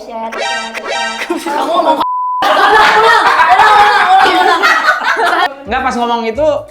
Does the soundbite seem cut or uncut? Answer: cut